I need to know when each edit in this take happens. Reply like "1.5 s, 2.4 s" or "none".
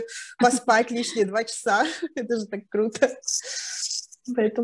none